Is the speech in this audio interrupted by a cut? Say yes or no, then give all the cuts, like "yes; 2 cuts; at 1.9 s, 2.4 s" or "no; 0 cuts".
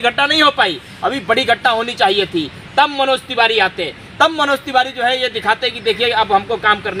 no; 0 cuts